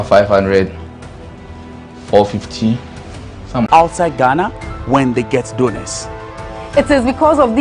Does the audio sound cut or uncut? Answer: cut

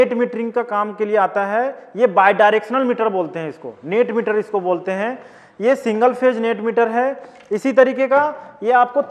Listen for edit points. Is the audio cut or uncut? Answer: uncut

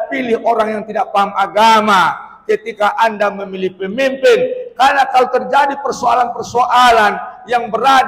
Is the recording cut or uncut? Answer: uncut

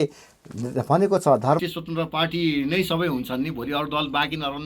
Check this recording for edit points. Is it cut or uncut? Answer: cut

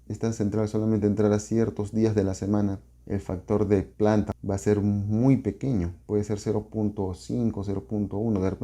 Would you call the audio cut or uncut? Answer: cut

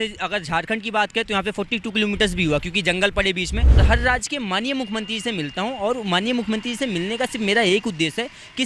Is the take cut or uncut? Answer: cut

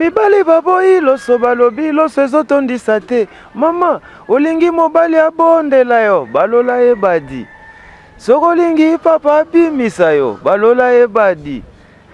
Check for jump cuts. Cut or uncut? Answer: uncut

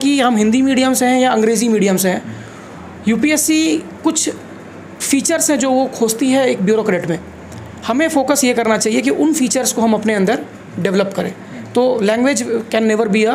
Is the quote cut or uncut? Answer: uncut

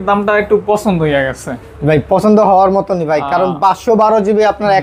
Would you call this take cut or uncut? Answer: uncut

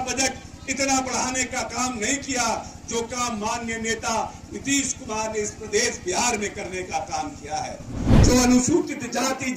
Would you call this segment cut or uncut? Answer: cut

